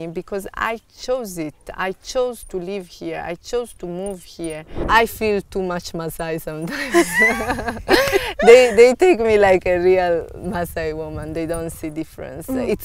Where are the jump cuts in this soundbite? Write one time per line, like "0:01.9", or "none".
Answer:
0:04.8